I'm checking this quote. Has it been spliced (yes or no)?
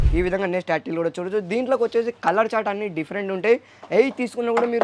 no